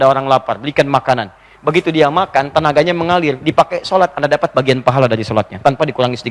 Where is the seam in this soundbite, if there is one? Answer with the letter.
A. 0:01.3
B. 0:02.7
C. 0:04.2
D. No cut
D